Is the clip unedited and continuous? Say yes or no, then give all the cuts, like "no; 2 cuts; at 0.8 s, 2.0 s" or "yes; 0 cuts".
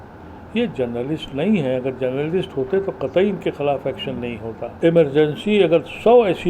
no; 1 cut; at 4.7 s